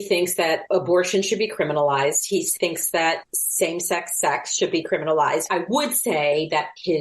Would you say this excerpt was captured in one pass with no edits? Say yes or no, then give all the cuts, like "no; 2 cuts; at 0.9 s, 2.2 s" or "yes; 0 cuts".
no; 1 cut; at 5.5 s